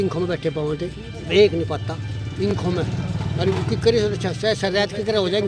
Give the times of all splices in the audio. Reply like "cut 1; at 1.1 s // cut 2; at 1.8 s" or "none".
none